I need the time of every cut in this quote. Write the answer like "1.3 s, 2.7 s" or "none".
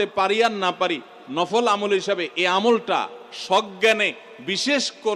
none